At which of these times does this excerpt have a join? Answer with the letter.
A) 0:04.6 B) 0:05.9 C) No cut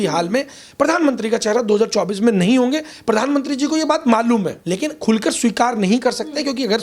A